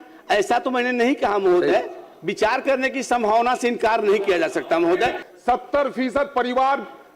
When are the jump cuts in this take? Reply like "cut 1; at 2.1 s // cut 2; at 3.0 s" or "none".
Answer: cut 1; at 5.3 s